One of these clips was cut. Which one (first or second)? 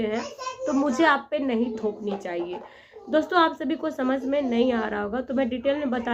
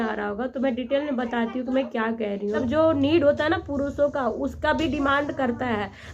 second